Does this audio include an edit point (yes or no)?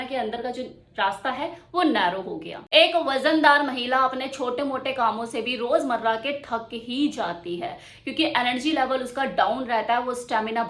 no